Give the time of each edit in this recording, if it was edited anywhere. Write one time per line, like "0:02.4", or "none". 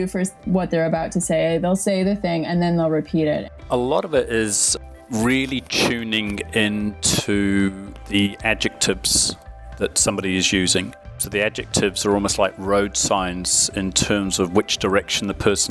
0:03.5